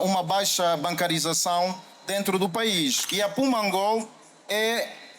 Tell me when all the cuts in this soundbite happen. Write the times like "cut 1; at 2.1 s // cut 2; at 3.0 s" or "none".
cut 1; at 3.0 s

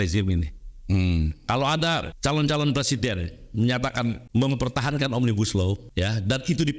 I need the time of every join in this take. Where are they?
cut 1; at 2.1 s // cut 2; at 4.2 s // cut 3; at 5.8 s

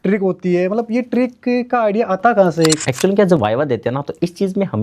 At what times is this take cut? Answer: cut 1; at 2.8 s

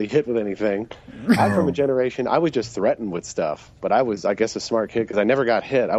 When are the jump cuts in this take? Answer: none

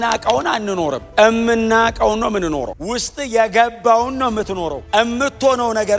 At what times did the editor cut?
cut 1; at 1.0 s // cut 2; at 2.8 s // cut 3; at 4.8 s

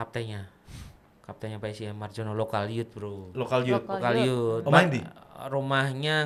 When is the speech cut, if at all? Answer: none

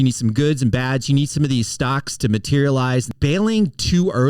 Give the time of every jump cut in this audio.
cut 1; at 3.1 s

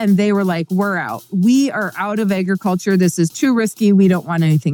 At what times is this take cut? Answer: none

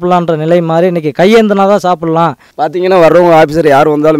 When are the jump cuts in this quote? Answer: cut 1; at 2.4 s

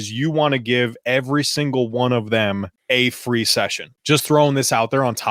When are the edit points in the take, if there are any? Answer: cut 1; at 2.7 s // cut 2; at 3.9 s

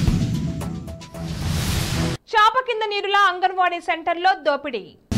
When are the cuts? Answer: none

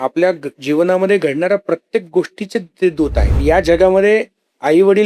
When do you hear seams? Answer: cut 1; at 3.3 s

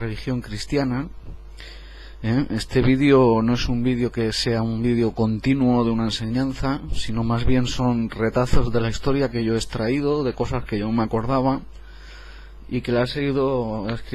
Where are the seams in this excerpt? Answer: cut 1; at 12.1 s

